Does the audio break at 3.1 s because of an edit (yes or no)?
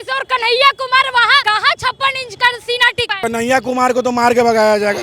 yes